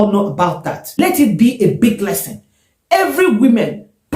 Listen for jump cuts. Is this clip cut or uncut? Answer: cut